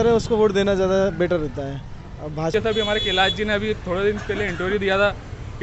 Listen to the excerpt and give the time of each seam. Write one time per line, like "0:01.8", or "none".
0:02.5